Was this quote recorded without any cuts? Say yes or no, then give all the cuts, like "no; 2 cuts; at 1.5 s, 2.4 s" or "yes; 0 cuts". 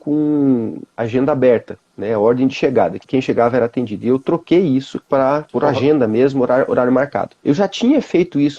no; 1 cut; at 3.0 s